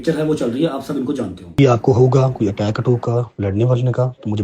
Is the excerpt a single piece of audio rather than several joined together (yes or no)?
no